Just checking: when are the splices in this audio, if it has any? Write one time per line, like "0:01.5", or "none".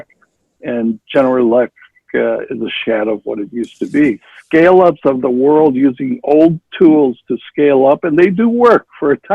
0:04.3